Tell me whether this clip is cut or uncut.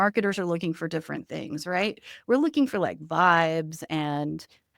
uncut